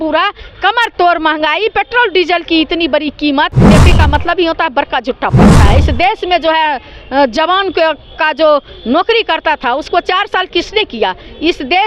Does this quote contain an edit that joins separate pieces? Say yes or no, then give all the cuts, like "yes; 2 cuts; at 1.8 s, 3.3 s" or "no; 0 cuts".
yes; 2 cuts; at 3.7 s, 5.6 s